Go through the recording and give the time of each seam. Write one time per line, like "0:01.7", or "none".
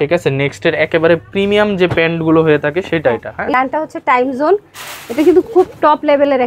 0:03.6